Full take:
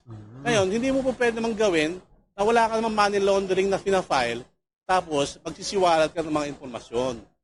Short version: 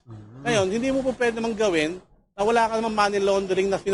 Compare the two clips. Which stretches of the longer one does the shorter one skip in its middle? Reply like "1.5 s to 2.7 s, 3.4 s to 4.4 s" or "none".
none